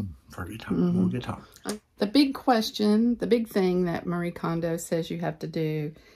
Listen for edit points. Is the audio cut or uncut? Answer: cut